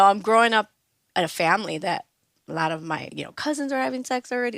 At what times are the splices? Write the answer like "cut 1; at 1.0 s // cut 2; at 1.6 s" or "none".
cut 1; at 1.0 s // cut 2; at 3.1 s